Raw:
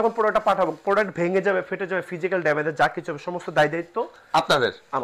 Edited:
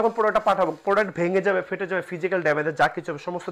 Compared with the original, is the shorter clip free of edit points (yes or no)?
yes